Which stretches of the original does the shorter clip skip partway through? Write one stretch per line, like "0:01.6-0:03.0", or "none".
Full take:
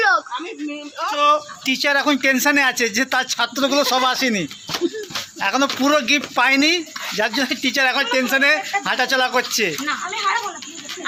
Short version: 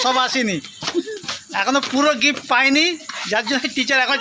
none